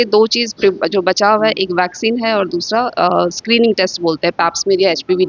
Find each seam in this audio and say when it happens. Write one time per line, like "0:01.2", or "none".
none